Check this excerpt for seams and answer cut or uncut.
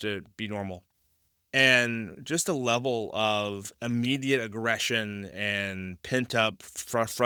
uncut